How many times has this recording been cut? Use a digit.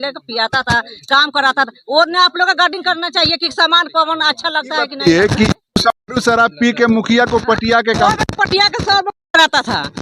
1